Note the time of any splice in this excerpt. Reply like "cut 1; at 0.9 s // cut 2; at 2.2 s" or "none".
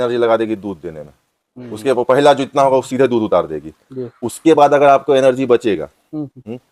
none